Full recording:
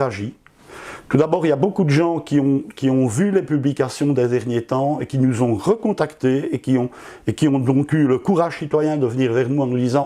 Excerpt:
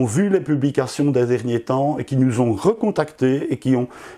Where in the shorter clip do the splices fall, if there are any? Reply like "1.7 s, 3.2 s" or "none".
none